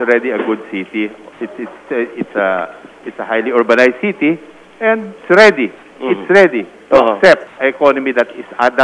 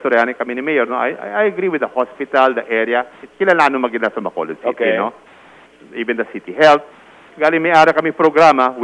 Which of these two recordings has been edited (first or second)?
first